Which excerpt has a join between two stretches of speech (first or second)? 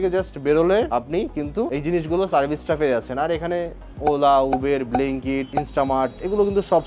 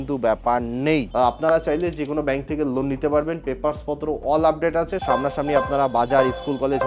second